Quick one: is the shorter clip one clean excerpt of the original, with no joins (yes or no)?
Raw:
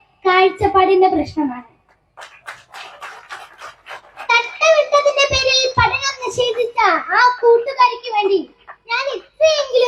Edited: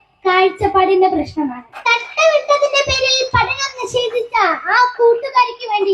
no